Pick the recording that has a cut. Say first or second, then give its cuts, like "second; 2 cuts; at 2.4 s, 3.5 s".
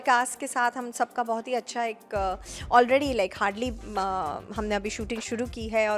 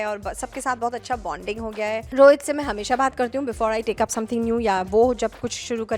second; 1 cut; at 2.1 s